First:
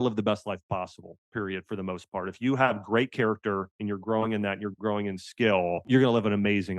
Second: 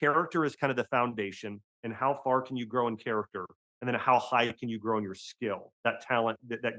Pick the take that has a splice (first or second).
first